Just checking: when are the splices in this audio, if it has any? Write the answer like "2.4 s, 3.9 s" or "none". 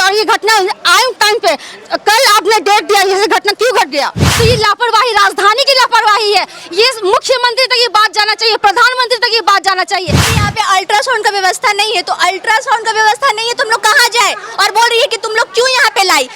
4.2 s, 10.2 s